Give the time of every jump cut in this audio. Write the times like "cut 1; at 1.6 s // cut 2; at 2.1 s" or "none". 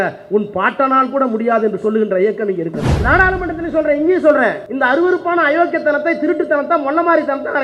cut 1; at 2.9 s // cut 2; at 4.7 s